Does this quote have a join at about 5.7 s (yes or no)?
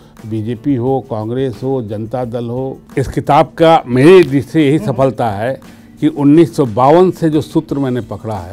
no